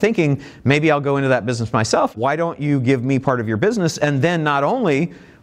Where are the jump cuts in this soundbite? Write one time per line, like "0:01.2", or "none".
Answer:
0:02.1